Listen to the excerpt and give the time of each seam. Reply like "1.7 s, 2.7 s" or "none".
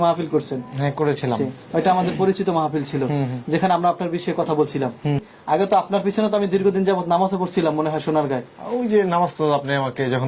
5.3 s